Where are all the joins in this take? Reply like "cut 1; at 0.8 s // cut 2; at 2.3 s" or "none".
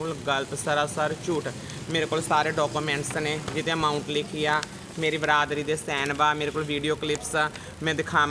none

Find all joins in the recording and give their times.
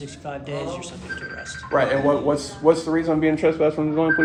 none

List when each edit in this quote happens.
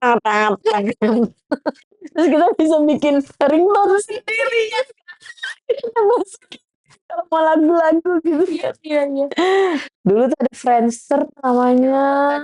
cut 1; at 9.9 s

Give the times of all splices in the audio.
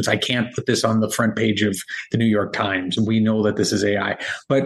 cut 1; at 2.9 s

